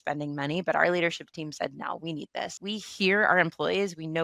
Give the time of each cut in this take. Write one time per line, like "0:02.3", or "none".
0:02.6